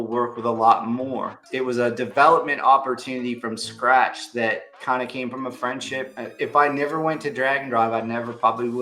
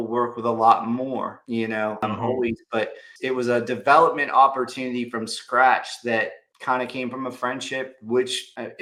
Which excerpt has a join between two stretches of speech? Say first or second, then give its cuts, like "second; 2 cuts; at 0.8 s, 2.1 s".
first; 3 cuts; at 1.4 s, 4.7 s, 6.1 s